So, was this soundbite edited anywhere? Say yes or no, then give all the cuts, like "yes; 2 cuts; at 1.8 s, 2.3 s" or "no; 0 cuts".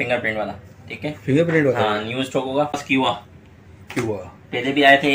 yes; 1 cut; at 2.8 s